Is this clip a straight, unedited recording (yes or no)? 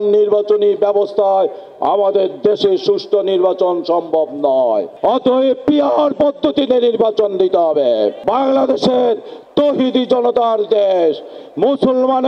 no